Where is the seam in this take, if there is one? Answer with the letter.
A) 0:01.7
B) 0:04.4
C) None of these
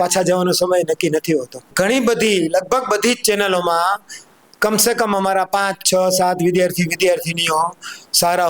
A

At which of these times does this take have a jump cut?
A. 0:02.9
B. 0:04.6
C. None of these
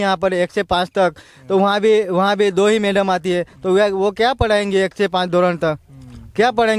C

